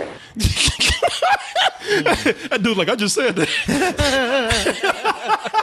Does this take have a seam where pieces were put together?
no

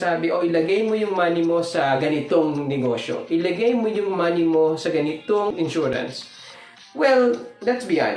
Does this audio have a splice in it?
yes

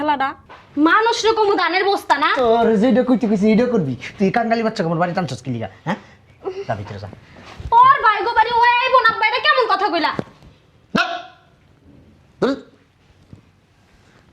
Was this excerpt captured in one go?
yes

